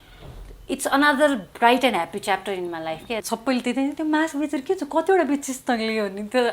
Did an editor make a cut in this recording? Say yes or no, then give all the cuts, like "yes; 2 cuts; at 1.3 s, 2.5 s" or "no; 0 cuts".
yes; 1 cut; at 3.2 s